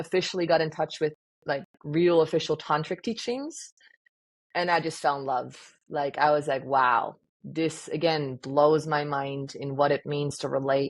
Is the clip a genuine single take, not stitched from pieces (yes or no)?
yes